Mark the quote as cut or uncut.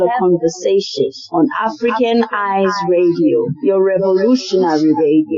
uncut